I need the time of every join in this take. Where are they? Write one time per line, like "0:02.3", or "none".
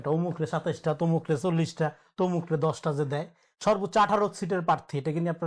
none